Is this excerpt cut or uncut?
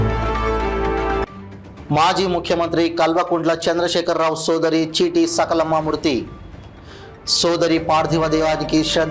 cut